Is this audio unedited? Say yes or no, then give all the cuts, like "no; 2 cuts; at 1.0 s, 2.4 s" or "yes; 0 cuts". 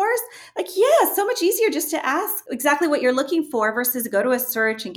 no; 1 cut; at 2.4 s